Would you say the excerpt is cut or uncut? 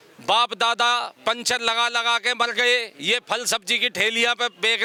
uncut